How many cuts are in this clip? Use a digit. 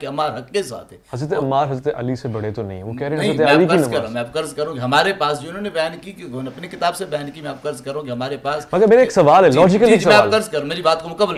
0